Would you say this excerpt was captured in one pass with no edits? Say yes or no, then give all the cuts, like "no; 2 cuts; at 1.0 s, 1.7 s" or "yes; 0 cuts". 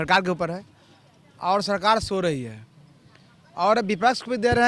yes; 0 cuts